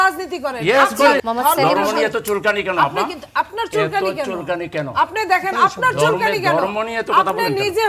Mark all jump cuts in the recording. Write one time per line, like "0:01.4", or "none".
0:01.2